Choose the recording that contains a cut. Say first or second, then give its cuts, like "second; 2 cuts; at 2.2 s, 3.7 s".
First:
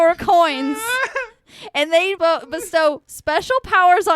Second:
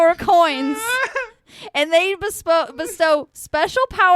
first; 1 cut; at 2.2 s